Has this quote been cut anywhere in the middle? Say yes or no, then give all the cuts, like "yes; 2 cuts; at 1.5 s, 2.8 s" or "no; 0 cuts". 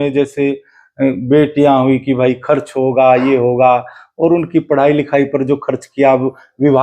no; 0 cuts